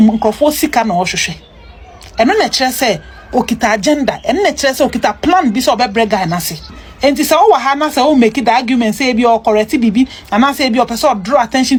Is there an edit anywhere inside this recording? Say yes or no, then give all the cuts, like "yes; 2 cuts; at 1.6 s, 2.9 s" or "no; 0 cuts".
no; 0 cuts